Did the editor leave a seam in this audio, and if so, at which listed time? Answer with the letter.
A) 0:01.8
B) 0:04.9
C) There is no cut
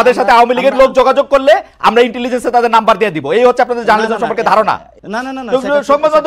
B